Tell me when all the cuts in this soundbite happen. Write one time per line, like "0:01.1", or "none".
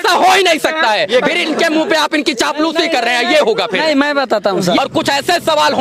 0:04.8